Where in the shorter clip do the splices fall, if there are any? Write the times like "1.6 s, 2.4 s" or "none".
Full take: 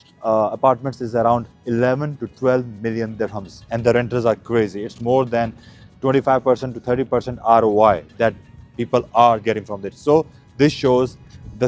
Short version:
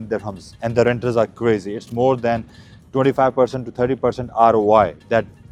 none